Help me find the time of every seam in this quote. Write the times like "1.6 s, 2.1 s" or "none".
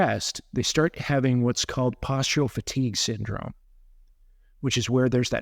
none